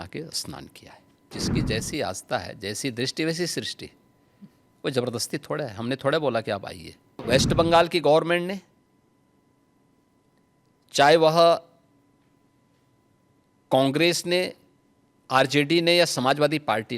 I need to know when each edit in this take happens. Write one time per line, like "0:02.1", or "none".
0:01.3
0:07.2